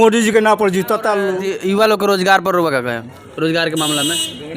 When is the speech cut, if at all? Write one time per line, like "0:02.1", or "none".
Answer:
0:01.4